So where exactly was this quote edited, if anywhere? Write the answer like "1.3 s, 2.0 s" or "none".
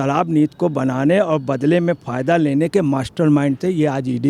none